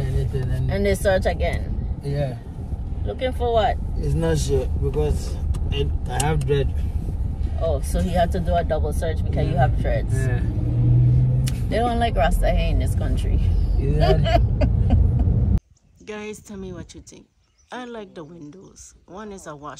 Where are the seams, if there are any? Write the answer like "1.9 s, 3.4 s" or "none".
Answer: 15.6 s